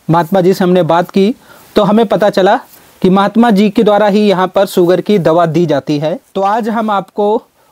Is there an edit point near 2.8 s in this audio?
no; 1 cut; at 6.2 s

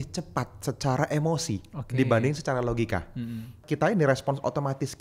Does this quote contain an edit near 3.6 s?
yes; 1 cut; at 3.6 s

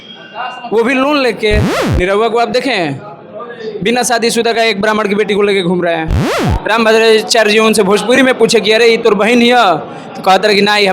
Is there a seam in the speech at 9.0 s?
no; 2 cuts; at 1.8 s, 6.4 s

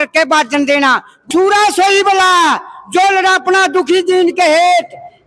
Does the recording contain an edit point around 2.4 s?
no; 1 cut; at 1.1 s

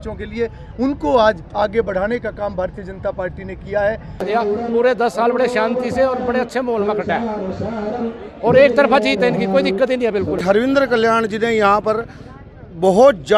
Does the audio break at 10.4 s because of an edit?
yes; 2 cuts; at 4.2 s, 10.4 s

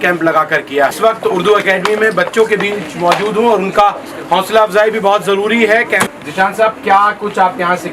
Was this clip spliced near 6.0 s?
yes; 2 cuts; at 0.9 s, 6.0 s

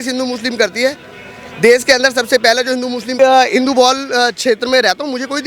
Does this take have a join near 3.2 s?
yes; 1 cut; at 3.2 s

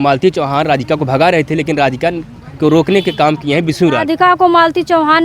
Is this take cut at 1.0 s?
no; 1 cut; at 4.0 s

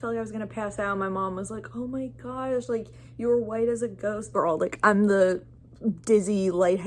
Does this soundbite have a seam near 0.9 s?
no; 1 cut; at 4.2 s

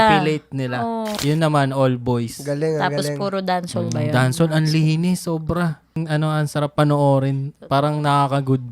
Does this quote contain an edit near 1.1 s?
yes; 2 cuts; at 1.1 s, 6.0 s

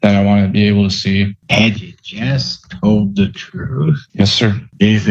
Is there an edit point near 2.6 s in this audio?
no; 2 cuts; at 1.4 s, 4.0 s

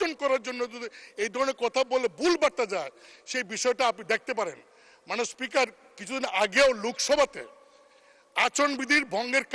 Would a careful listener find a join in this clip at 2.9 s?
no; 0 cuts

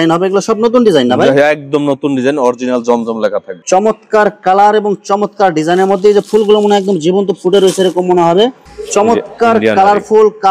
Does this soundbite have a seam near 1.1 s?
no; 2 cuts; at 3.5 s, 8.7 s

